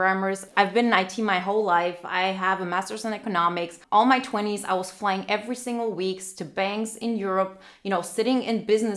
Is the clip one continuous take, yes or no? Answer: yes